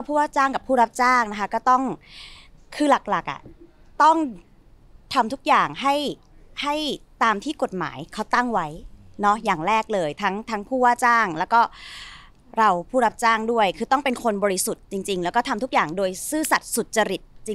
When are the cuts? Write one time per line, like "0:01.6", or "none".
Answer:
none